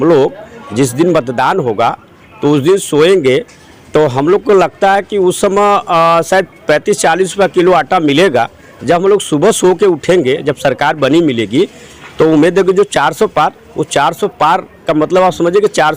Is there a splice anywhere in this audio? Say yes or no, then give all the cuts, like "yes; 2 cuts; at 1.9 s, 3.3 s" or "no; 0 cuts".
no; 0 cuts